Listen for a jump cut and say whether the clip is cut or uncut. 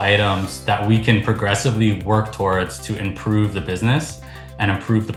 uncut